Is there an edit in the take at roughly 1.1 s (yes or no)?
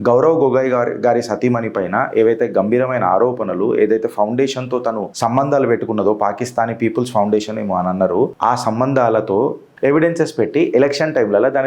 no